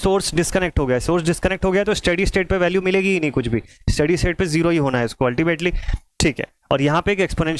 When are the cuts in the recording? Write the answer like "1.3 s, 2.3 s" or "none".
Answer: none